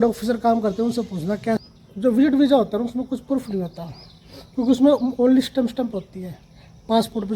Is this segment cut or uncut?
cut